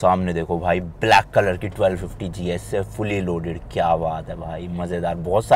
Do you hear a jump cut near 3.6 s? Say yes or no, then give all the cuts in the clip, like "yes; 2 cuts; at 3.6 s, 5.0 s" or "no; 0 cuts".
no; 0 cuts